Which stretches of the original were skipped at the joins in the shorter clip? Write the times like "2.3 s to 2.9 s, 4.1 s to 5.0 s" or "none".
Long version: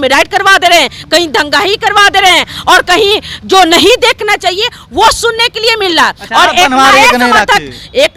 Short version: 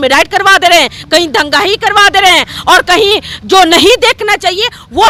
none